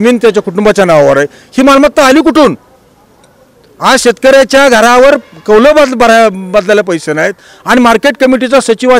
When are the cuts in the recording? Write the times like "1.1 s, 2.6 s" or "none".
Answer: none